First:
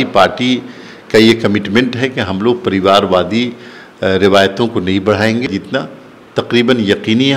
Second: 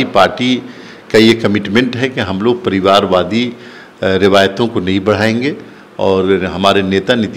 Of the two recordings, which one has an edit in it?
first; 1 cut; at 5.5 s

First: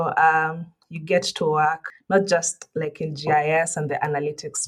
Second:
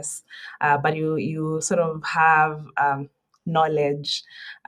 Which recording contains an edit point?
first; 1 cut; at 1.9 s

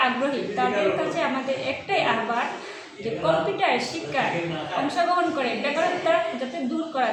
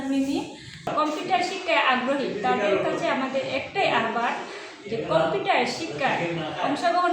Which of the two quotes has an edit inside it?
second; 1 cut; at 0.9 s

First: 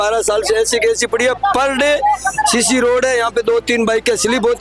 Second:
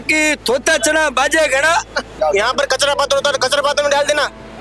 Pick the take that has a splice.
second; 1 cut; at 2.1 s

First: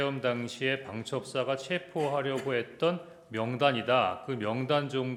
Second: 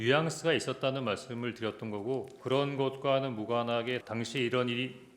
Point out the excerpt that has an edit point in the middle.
second; 2 cuts; at 2.4 s, 4.0 s

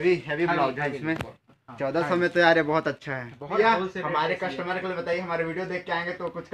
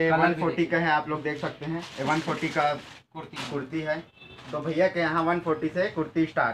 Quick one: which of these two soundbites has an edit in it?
first; 1 cut; at 3.5 s

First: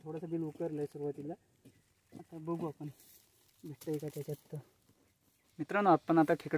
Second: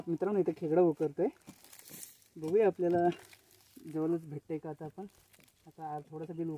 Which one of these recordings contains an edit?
first; 1 cut; at 5.6 s

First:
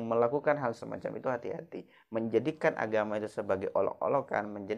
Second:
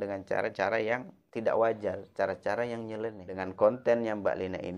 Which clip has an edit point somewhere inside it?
second; 1 cut; at 3.3 s

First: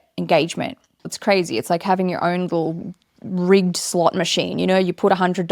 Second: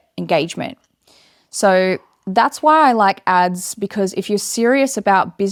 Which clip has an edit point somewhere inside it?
first; 1 cut; at 1.1 s

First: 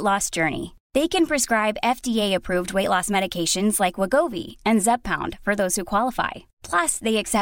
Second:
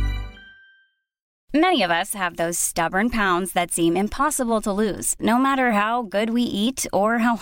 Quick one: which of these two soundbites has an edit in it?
second; 1 cut; at 1.3 s

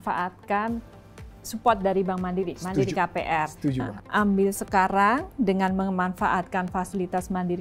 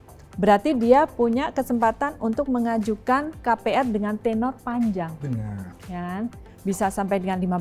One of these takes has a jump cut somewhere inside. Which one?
first; 1 cut; at 3.9 s

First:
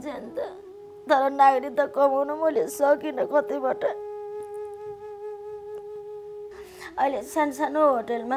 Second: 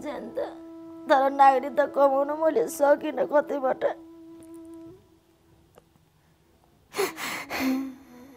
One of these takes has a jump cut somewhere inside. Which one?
first; 2 cuts; at 3.9 s, 6.4 s

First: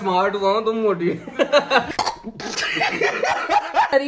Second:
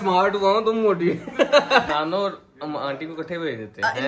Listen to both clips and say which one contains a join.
second; 1 cut; at 1.9 s

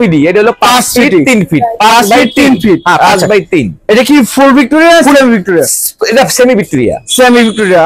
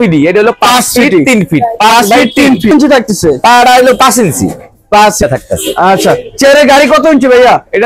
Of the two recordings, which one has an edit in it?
second; 2 cuts; at 2.7 s, 5.2 s

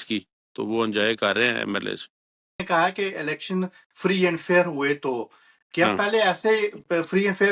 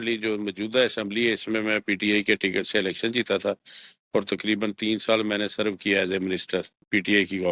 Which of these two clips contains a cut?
first; 1 cut; at 2.6 s

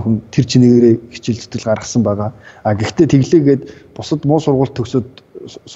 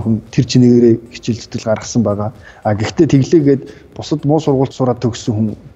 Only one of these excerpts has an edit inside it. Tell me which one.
second; 1 cut; at 4.7 s

